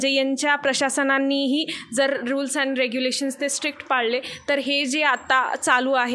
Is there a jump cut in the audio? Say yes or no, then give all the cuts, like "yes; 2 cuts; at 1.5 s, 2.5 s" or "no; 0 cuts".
no; 0 cuts